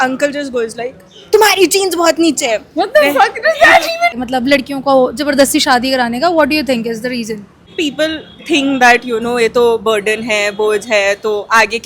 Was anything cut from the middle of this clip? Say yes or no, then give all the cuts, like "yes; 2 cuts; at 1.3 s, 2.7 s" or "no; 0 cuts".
yes; 2 cuts; at 4.1 s, 7.6 s